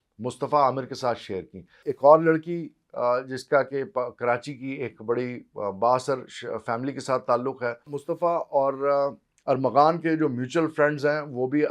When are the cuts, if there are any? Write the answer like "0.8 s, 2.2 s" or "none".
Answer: 1.9 s, 8.0 s